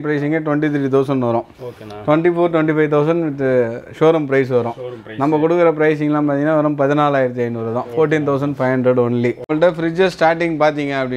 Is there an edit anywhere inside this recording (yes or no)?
yes